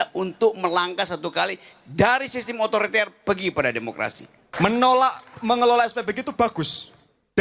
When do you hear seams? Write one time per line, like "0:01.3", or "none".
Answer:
0:04.4